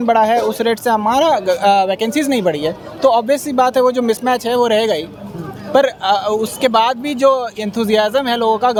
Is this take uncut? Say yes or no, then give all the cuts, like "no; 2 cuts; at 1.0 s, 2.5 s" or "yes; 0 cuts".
yes; 0 cuts